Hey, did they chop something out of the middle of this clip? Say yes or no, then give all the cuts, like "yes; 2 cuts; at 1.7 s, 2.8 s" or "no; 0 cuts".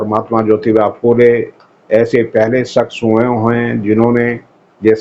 no; 0 cuts